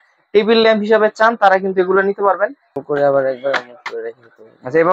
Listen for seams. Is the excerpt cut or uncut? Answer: cut